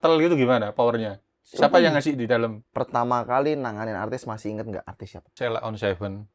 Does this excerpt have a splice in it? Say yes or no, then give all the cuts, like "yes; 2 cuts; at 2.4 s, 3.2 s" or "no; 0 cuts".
yes; 2 cuts; at 2.6 s, 5.3 s